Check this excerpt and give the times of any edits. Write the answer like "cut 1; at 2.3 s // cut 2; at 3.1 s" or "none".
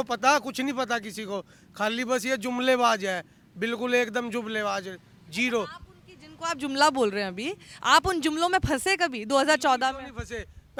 none